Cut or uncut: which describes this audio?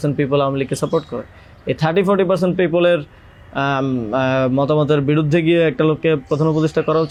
uncut